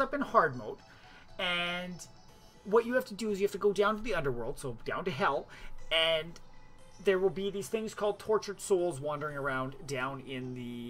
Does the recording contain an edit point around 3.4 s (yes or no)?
no